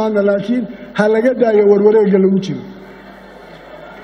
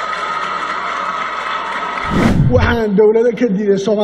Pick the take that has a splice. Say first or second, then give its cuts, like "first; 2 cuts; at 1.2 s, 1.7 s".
second; 1 cut; at 2.2 s